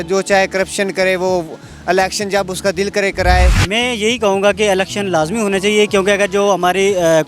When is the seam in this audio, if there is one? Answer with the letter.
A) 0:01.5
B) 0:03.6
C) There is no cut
B